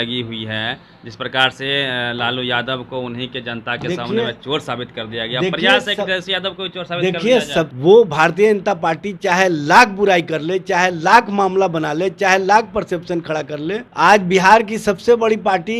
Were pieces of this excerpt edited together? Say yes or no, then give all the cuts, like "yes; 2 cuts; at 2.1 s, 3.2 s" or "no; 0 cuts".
yes; 2 cuts; at 7.7 s, 13.8 s